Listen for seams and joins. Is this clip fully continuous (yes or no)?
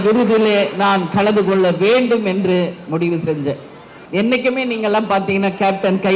no